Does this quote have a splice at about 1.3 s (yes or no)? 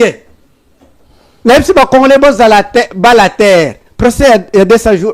yes